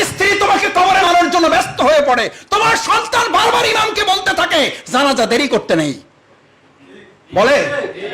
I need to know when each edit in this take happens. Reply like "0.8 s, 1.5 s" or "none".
1.1 s